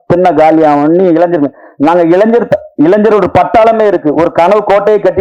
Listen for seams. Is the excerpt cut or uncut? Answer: uncut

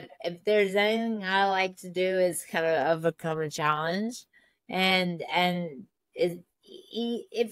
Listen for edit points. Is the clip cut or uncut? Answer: uncut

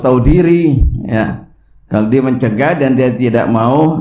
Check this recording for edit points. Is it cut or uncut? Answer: uncut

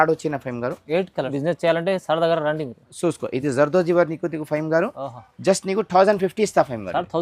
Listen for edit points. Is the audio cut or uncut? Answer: cut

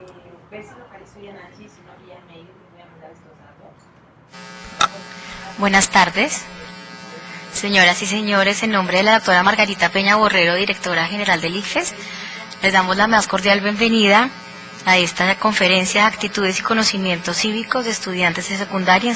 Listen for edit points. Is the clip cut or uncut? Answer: uncut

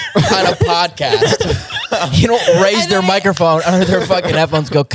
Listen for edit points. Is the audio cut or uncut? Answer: uncut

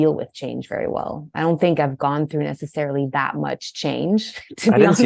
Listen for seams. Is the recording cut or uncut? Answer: uncut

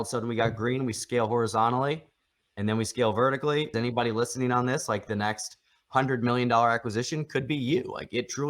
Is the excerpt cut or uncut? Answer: cut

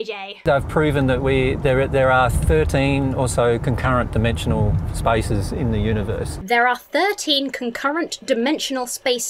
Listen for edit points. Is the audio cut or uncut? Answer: uncut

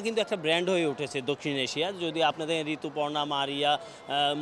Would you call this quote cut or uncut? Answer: uncut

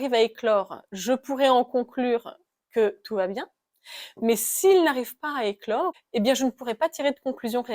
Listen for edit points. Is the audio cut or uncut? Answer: cut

